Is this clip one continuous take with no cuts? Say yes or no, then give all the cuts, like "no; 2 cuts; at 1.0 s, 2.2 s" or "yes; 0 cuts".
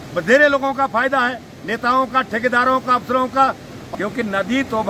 no; 1 cut; at 3.7 s